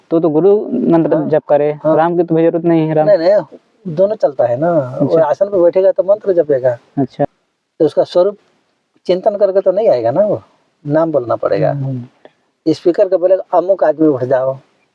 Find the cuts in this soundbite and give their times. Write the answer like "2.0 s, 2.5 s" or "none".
7.3 s